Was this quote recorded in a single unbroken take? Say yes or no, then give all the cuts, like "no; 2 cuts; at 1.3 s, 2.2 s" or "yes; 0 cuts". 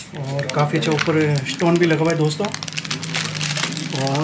yes; 0 cuts